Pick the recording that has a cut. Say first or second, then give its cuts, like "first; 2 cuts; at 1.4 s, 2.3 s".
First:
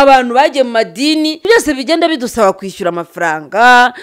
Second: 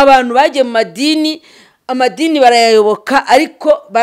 first; 1 cut; at 1.5 s